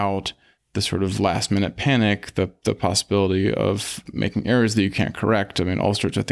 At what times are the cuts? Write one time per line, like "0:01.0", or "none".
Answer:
0:04.0